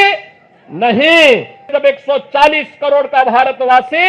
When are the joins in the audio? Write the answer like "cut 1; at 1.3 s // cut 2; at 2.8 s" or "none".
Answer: cut 1; at 1.8 s